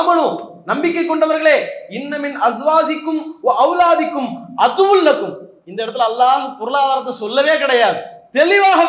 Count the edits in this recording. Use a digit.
0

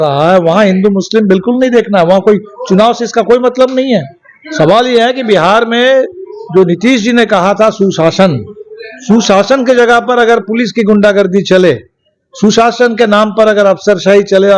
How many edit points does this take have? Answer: 0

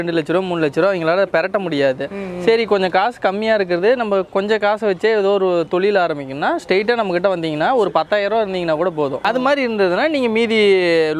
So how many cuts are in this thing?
1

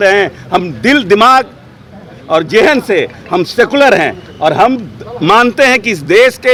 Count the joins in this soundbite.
0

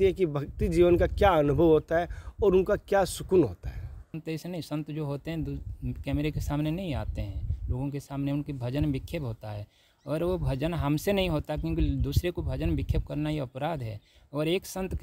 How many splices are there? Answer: 1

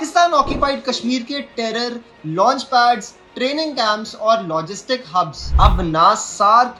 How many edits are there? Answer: 1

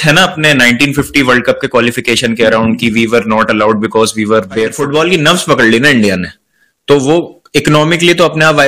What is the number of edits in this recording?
1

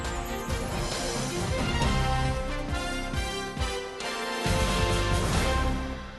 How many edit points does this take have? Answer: 1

